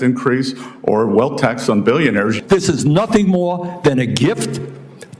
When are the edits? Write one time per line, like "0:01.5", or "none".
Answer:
0:02.4